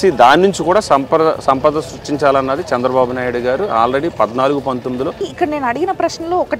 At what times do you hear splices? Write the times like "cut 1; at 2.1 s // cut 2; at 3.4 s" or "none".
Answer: cut 1; at 5.2 s